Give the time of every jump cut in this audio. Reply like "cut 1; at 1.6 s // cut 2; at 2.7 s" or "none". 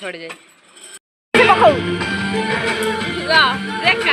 cut 1; at 1.0 s